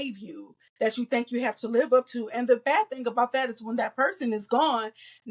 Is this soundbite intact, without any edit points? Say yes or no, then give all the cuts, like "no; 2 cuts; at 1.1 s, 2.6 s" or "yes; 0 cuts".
yes; 0 cuts